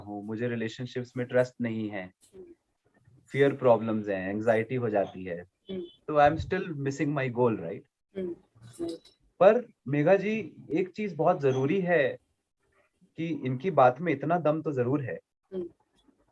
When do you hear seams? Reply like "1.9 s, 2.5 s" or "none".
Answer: none